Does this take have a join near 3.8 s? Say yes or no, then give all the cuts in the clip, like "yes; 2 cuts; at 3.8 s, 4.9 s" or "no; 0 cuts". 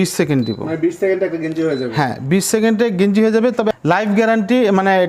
yes; 1 cut; at 3.8 s